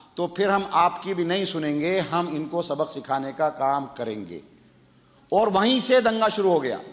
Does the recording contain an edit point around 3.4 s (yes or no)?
no